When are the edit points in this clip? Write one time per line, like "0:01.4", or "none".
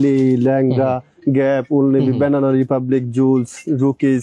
none